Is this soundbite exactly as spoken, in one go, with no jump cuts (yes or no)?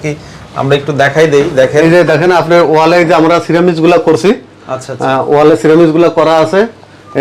yes